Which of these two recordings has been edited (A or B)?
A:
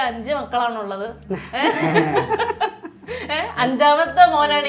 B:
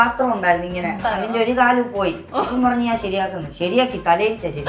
B